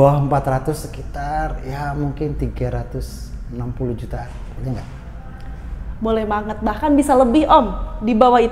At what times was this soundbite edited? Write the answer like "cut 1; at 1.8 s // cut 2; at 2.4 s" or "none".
none